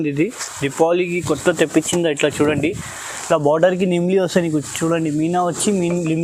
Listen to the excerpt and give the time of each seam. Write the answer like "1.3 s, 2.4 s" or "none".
none